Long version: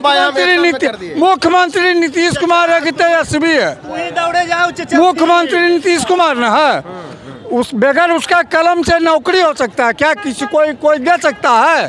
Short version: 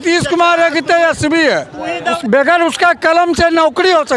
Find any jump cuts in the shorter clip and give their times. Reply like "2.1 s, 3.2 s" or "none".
2.2 s